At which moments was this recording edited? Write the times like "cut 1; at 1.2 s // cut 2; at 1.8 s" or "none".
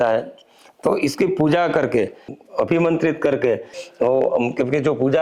cut 1; at 2.4 s // cut 2; at 3.8 s